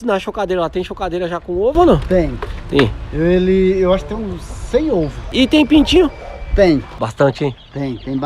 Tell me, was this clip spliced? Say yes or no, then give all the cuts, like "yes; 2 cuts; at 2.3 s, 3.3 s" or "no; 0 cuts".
yes; 2 cuts; at 5.3 s, 7.0 s